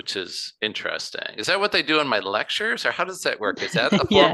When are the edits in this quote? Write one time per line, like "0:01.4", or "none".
none